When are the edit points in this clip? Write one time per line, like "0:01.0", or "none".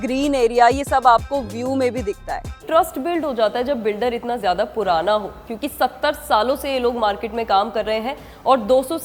0:02.6